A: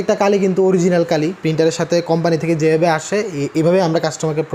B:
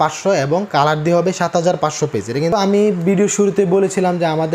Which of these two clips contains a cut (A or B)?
B